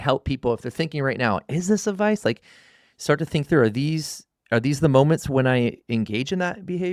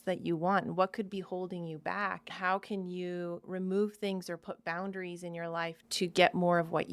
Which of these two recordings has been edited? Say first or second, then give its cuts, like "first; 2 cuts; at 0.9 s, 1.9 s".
second; 3 cuts; at 2.3 s, 3.4 s, 5.8 s